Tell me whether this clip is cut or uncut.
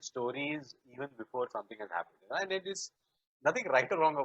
uncut